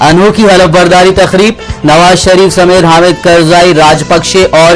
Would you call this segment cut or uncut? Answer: uncut